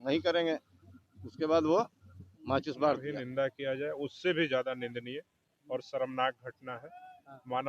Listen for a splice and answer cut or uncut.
cut